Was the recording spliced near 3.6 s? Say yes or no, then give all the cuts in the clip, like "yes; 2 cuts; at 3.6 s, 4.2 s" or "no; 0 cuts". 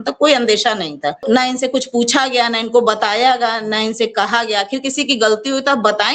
no; 1 cut; at 1.2 s